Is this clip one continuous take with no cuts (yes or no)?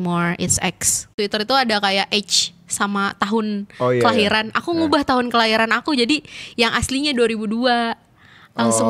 no